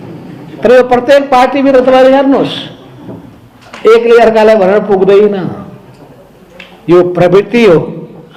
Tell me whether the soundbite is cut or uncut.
uncut